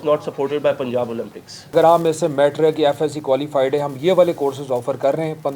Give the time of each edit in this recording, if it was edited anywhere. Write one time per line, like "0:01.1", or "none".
0:01.7

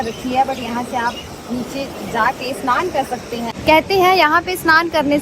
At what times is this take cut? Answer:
0:03.5

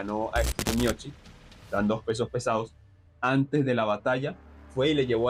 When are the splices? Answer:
none

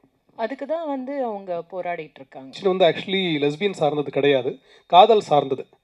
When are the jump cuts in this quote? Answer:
0:02.6

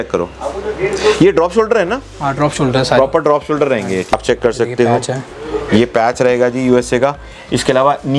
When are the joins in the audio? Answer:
0:04.1

